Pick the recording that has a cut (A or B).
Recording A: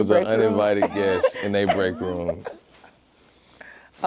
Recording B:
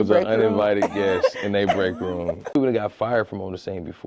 B